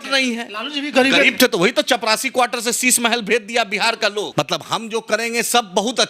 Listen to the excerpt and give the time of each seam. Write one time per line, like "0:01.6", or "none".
0:04.3